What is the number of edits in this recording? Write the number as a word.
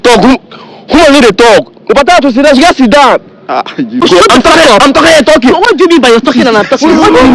one